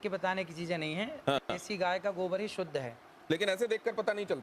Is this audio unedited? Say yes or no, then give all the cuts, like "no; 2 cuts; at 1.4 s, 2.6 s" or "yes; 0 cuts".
yes; 0 cuts